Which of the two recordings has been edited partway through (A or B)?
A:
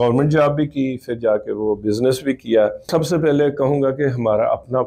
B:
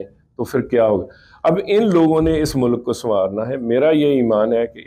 A